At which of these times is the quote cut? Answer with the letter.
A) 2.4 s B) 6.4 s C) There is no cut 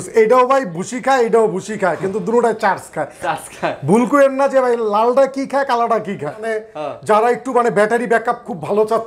B